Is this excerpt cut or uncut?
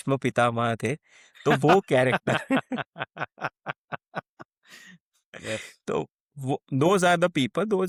uncut